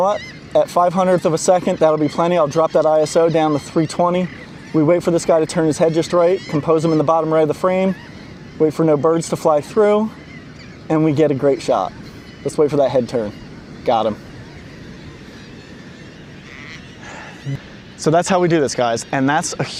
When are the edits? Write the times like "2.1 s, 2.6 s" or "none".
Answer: none